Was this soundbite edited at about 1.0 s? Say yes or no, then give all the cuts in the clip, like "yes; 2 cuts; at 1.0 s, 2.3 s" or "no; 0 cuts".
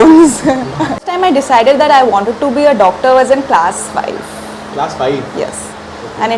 yes; 1 cut; at 1.0 s